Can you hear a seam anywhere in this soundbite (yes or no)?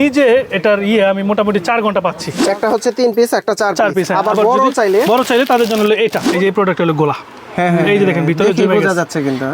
yes